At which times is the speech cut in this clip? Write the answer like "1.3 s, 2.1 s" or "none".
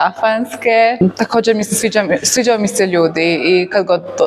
1.0 s

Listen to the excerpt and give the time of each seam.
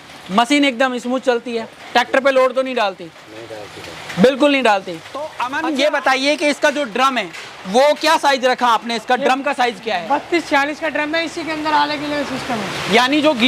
5.4 s

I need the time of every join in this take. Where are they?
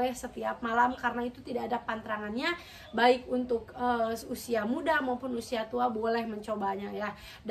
none

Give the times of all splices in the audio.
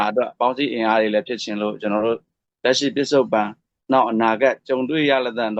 2.5 s

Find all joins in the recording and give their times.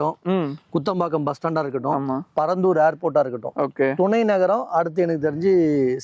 none

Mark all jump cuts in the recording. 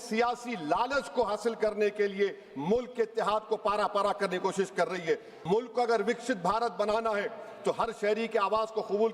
5.3 s

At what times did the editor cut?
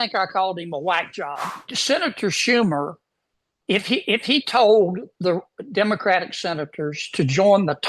1.4 s

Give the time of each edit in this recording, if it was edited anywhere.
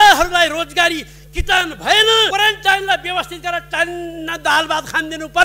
2.3 s

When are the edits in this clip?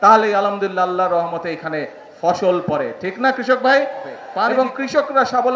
4.5 s

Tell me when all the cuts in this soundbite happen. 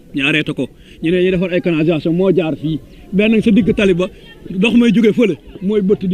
none

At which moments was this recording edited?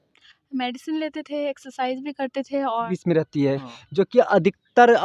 2.9 s

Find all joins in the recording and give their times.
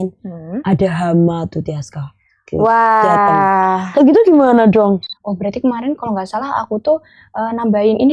5.1 s

